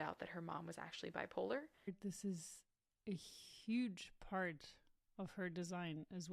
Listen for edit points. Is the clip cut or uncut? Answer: cut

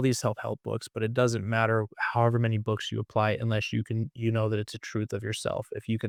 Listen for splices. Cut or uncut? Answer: uncut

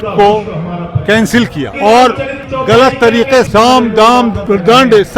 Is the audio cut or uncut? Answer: cut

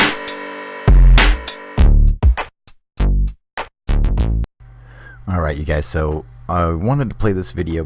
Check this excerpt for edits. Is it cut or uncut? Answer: cut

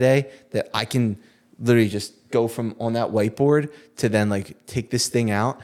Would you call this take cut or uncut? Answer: uncut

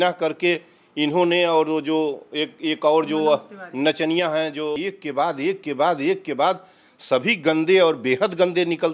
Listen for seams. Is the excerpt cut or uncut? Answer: cut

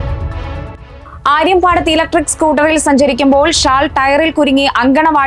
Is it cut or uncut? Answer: cut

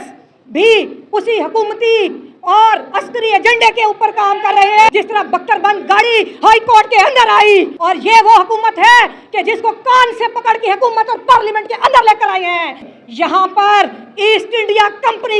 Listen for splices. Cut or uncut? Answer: cut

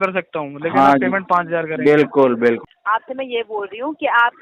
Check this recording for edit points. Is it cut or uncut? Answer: cut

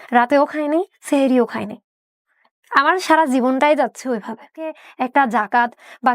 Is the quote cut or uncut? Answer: cut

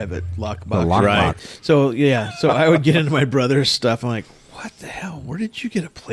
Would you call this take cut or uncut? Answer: cut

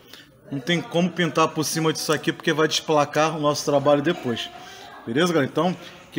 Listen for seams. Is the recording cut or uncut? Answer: uncut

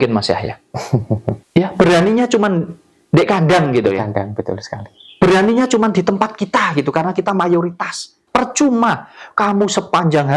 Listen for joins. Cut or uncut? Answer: cut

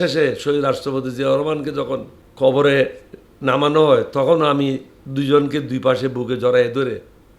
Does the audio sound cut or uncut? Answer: cut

